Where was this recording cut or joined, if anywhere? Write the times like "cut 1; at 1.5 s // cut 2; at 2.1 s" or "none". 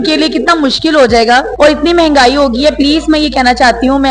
cut 1; at 1.5 s